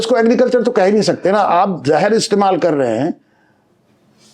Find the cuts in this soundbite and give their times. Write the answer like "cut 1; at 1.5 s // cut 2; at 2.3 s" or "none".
none